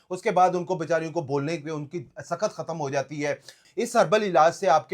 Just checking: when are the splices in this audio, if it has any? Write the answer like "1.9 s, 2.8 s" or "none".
3.5 s